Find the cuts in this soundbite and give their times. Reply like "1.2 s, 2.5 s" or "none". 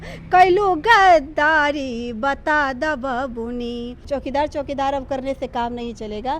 3.9 s